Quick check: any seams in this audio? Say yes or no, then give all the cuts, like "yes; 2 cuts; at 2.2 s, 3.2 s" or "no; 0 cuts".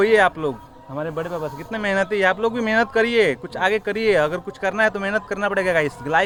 no; 0 cuts